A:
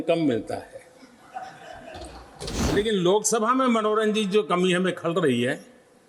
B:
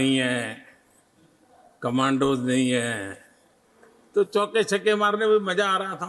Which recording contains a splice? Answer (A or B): A